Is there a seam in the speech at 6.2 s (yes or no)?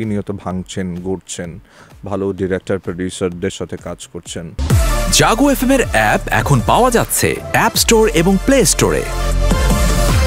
no